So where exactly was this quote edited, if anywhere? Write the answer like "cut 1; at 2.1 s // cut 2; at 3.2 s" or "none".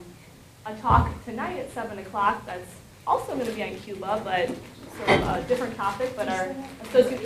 cut 1; at 1.0 s